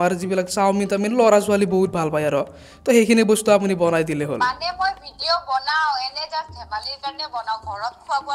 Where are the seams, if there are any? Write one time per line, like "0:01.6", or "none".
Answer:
none